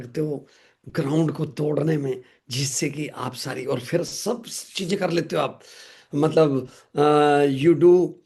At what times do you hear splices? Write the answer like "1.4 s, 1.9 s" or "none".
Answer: none